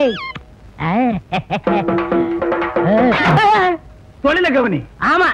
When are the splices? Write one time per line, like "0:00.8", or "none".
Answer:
none